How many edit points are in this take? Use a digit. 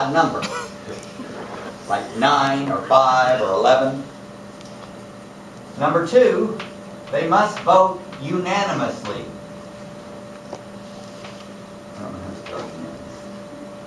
0